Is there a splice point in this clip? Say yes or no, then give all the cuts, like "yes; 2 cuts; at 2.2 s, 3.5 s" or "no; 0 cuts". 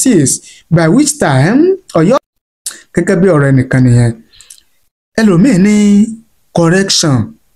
yes; 1 cut; at 2.2 s